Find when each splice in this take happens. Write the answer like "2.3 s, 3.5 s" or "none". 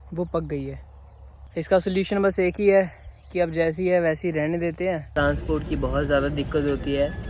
5.1 s